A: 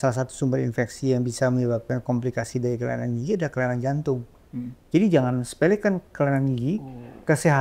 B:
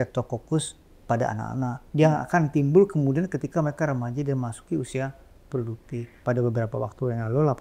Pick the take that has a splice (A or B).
B